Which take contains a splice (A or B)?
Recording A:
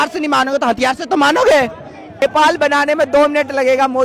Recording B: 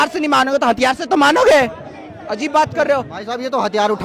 A